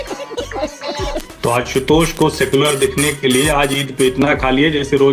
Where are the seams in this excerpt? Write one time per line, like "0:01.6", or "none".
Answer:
0:01.2